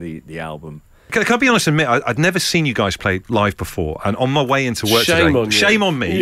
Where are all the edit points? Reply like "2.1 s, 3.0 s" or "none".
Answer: 1.1 s